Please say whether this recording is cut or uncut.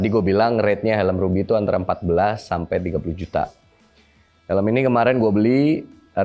uncut